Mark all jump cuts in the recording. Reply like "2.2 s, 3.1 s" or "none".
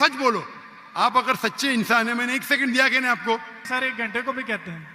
3.6 s